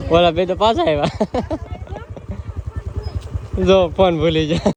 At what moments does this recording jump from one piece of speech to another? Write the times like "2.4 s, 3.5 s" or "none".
none